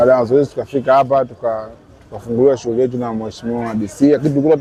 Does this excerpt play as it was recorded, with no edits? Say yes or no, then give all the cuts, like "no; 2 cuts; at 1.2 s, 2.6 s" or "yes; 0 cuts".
yes; 0 cuts